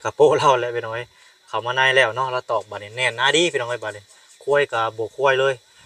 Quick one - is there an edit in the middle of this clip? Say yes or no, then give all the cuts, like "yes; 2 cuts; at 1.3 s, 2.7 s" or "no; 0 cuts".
no; 0 cuts